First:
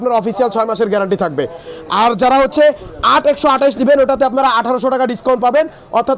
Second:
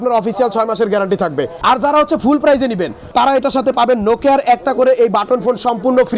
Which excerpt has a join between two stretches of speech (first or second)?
second